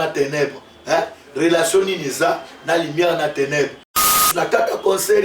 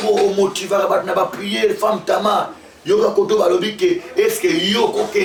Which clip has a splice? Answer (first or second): first